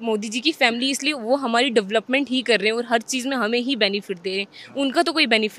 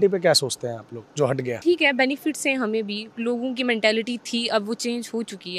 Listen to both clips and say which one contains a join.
second; 1 cut; at 1.6 s

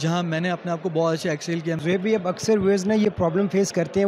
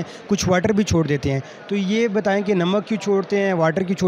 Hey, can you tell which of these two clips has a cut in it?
first; 1 cut; at 1.8 s

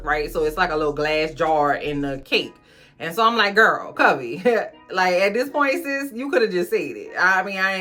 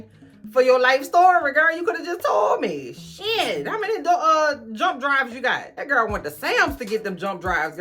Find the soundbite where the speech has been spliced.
second; 1 cut; at 5.7 s

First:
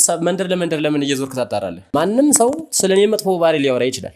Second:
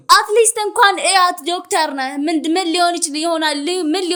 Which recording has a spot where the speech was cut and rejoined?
first; 1 cut; at 1.9 s

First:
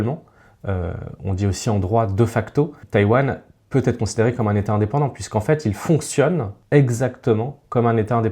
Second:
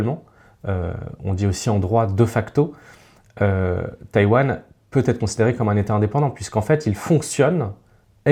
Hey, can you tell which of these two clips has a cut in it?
first; 2 cuts; at 2.8 s, 6.5 s

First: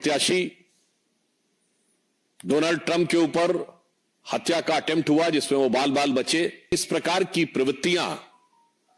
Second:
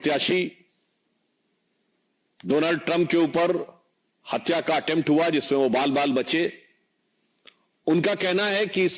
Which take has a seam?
first; 1 cut; at 6.7 s

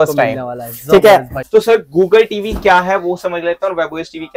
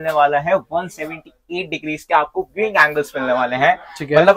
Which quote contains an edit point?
first; 1 cut; at 1.4 s

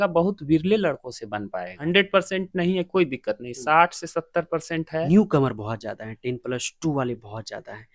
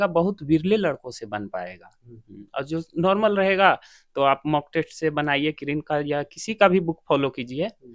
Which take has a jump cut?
first; 2 cuts; at 1.8 s, 5.1 s

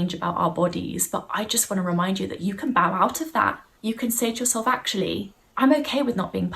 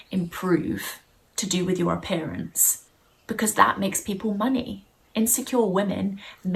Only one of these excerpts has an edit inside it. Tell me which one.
first; 2 cuts; at 3.7 s, 5.4 s

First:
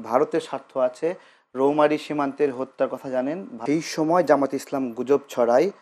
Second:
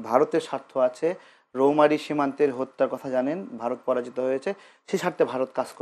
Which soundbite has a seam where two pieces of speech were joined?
first; 1 cut; at 3.5 s

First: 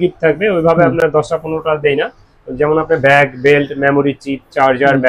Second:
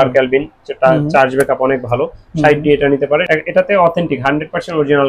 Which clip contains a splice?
second; 1 cut; at 3.2 s

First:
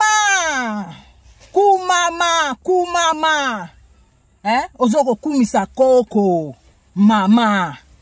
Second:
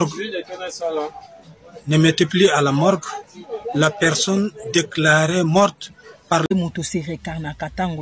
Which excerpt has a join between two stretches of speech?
second; 1 cut; at 6.5 s

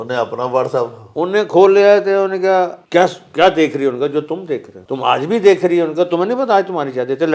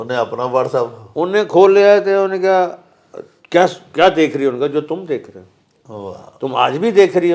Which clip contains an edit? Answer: first; 2 cuts; at 2.8 s, 4.8 s

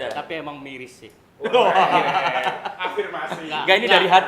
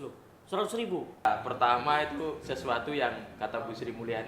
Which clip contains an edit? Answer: second; 1 cut; at 1.2 s

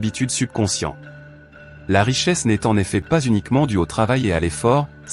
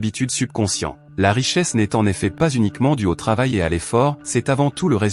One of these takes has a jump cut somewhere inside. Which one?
second; 2 cuts; at 1.0 s, 4.2 s

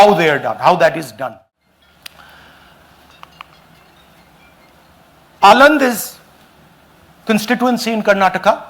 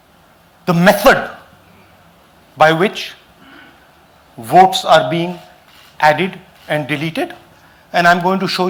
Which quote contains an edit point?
first; 1 cut; at 1.2 s

